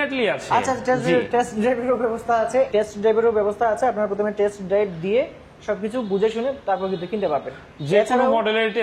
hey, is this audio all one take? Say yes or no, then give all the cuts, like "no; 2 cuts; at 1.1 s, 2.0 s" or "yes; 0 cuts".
no; 1 cut; at 2.7 s